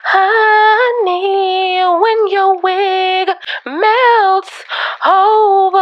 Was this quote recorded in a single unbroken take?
yes; 0 cuts

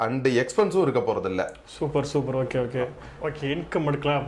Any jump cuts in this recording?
yes; 1 cut; at 3.0 s

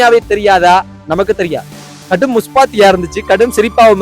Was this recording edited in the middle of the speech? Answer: yes; 1 cut; at 1.9 s

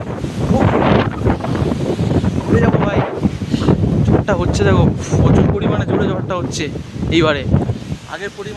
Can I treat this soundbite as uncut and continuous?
yes; 0 cuts

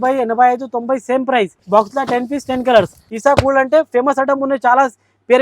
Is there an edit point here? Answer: yes; 2 cuts; at 1.6 s, 3.0 s

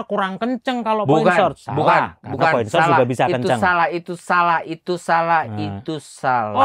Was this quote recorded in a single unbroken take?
yes; 0 cuts

